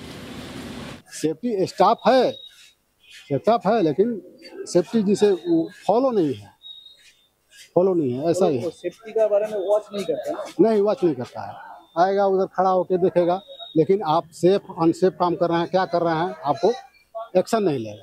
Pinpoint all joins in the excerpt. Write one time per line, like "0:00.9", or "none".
0:01.0